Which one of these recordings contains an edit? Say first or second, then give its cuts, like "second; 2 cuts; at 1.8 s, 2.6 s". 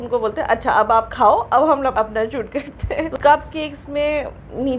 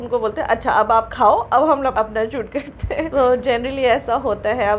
first; 1 cut; at 3.1 s